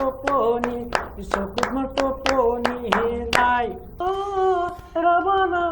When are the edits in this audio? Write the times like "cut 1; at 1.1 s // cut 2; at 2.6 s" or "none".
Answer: cut 1; at 4.0 s